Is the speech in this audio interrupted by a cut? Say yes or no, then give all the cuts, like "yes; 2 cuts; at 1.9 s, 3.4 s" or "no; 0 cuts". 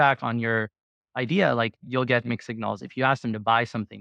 no; 0 cuts